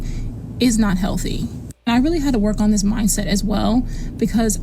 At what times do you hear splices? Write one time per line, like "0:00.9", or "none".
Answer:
none